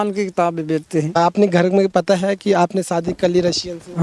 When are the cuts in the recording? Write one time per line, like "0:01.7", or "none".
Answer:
0:01.1